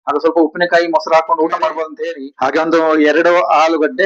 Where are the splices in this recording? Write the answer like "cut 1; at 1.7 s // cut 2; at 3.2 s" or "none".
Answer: cut 1; at 1.9 s